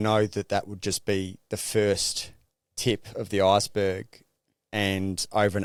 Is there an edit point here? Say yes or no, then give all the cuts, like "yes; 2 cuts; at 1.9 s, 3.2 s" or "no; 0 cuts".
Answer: no; 0 cuts